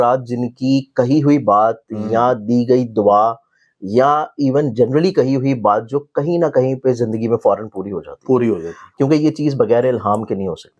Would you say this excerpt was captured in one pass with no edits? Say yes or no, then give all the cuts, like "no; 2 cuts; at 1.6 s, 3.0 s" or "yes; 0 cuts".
no; 1 cut; at 8.8 s